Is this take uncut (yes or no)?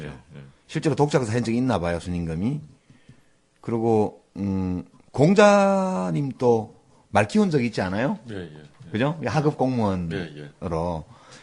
yes